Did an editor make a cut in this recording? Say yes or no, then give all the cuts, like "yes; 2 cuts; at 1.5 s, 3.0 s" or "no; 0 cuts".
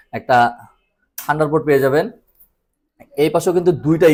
no; 0 cuts